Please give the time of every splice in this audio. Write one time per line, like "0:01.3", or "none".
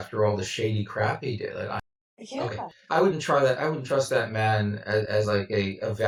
none

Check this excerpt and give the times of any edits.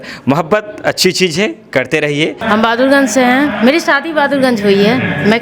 0:02.4

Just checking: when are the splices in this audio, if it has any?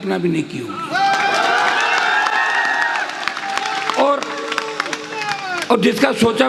none

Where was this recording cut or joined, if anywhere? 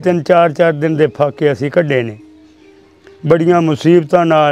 none

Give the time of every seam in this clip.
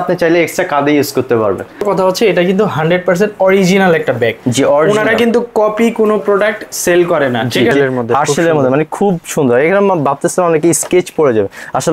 0:01.8
0:07.7

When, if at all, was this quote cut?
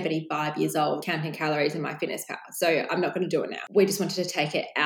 0:01.0
0:03.6

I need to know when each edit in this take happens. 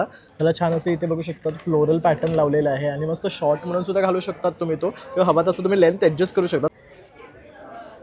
0:06.7

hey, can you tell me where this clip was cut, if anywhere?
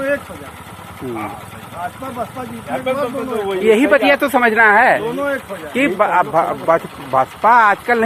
none

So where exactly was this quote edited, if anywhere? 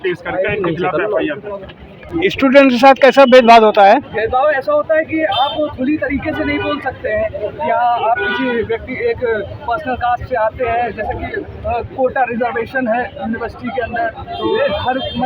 0:02.1

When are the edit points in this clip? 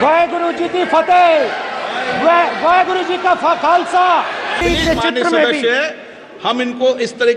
0:04.5

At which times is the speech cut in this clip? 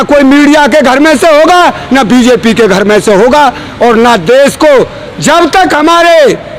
none

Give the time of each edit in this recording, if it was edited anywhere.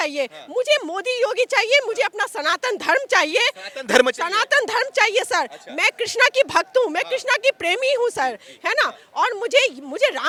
none

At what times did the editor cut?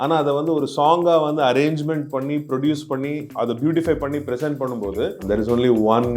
0:03.2
0:05.2

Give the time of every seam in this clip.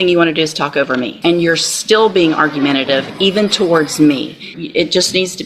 0:01.2
0:04.5

